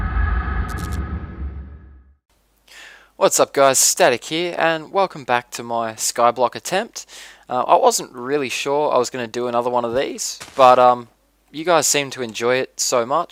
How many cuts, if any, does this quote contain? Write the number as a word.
zero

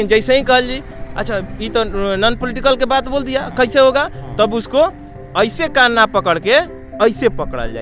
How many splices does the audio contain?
zero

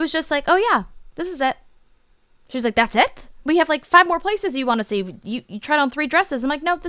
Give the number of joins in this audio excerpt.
one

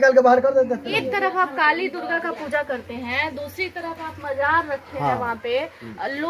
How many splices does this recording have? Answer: one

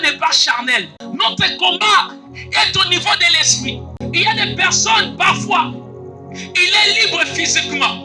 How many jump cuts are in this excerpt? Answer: two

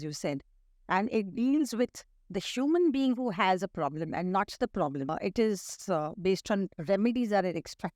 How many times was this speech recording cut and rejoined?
one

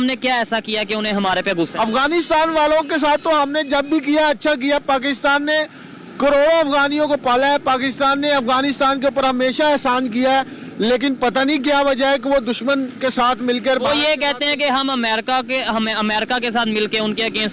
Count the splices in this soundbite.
zero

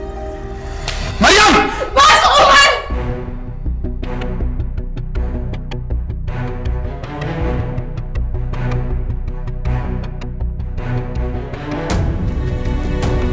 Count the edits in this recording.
zero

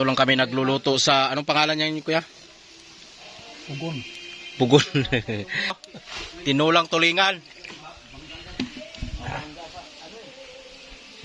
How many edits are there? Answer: one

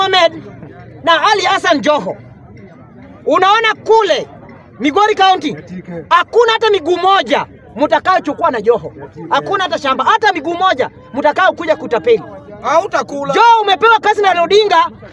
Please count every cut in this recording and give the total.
zero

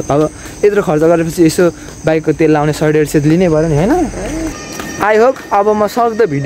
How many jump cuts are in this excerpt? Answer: one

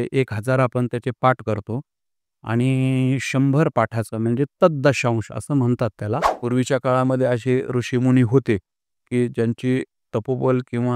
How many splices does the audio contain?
one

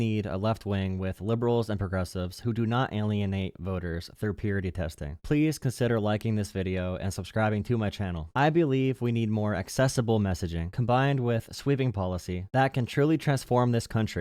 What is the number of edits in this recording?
zero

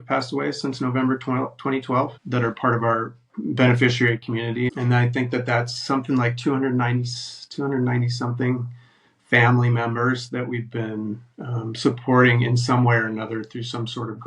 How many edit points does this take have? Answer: three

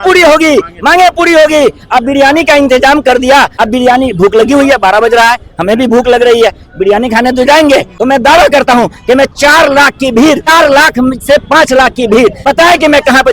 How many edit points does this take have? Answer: four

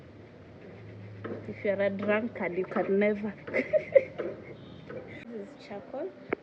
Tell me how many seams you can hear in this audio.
one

